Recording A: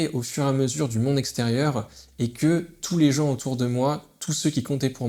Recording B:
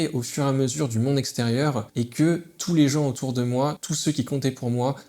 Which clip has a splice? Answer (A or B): B